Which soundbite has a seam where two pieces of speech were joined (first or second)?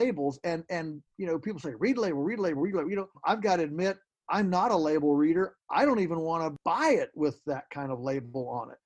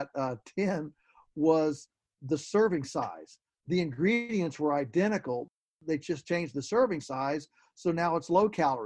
second